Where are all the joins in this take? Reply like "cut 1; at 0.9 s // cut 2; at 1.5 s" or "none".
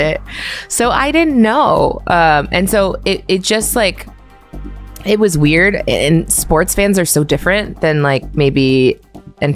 none